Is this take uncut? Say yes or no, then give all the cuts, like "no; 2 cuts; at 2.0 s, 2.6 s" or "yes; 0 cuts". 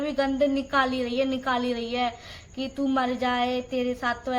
yes; 0 cuts